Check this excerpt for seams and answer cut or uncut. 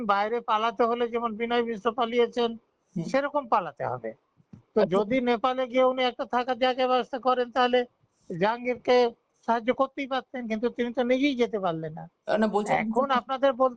uncut